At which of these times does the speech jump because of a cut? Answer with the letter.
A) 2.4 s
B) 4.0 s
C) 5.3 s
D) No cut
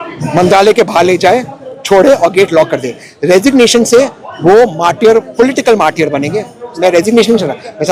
D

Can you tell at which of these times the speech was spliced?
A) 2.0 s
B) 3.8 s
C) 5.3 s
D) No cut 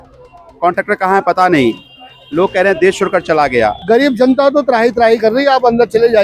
B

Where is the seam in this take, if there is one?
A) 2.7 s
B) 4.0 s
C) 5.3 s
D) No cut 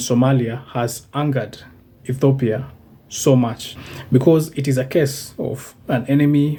D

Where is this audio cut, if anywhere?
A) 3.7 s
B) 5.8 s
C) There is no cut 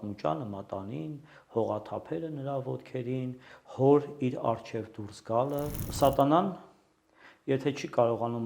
B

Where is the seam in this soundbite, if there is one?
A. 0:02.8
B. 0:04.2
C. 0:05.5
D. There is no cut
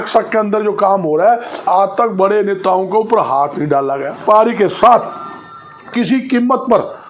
B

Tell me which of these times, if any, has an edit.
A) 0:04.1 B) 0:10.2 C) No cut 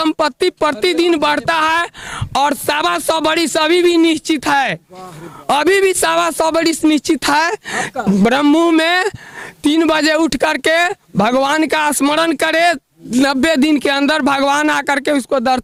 C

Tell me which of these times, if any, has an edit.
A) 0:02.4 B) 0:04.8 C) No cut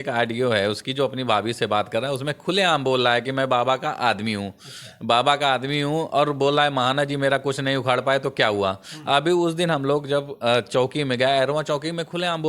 C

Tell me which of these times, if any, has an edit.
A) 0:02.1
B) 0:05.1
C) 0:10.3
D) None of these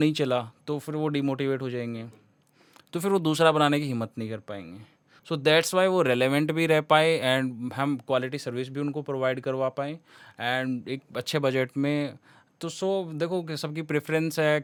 D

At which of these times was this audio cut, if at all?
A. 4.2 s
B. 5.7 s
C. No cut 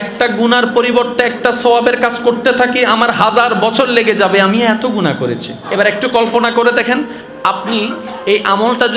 B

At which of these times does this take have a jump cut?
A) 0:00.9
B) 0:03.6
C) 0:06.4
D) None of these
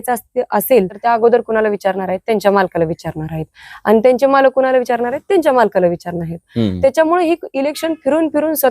A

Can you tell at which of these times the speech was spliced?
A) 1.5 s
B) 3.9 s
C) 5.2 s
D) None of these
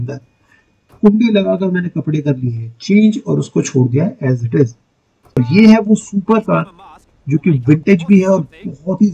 C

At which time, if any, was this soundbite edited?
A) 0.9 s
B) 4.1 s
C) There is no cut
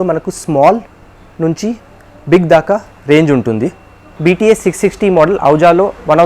B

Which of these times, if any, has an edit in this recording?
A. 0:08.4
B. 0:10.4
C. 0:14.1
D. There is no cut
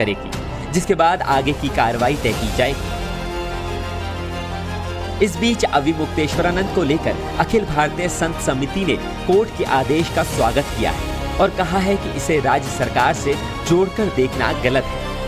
D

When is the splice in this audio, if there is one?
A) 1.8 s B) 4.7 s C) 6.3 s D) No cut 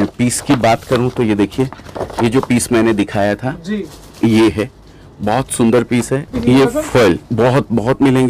C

